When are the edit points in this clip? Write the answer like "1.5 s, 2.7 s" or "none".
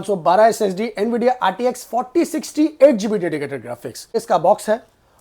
4.2 s